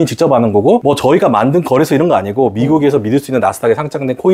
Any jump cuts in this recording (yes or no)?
no